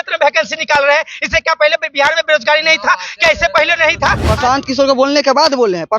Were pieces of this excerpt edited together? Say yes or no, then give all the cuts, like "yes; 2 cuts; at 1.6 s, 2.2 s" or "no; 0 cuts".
yes; 1 cut; at 4.2 s